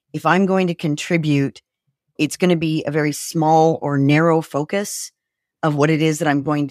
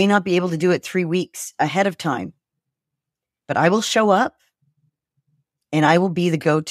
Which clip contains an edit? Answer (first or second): first